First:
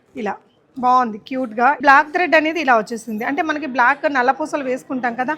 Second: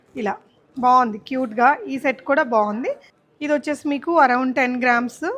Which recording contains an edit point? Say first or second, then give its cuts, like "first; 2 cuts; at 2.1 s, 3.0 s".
first; 1 cut; at 1.8 s